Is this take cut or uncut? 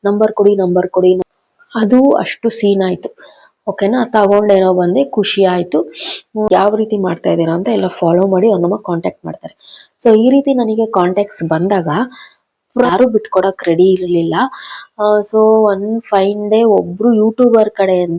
cut